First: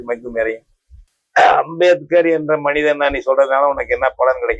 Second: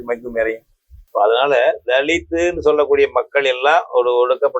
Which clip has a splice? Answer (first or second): first